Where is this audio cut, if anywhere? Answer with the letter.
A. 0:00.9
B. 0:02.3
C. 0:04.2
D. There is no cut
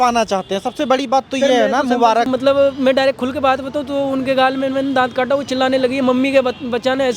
B